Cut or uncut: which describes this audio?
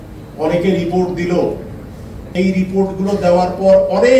cut